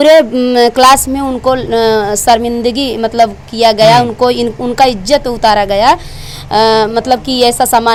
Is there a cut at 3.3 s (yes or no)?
no